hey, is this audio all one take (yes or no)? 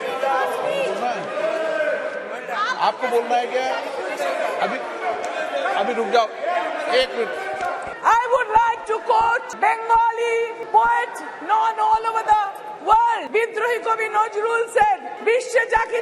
no